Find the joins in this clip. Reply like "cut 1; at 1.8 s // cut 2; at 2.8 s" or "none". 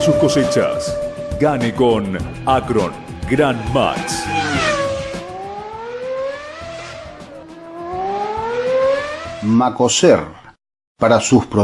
cut 1; at 9.3 s